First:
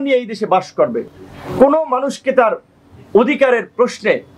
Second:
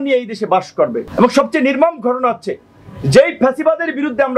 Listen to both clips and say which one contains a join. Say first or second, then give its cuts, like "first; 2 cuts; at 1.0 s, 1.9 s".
second; 1 cut; at 1.0 s